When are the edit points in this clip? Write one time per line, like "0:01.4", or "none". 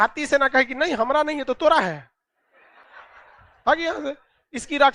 none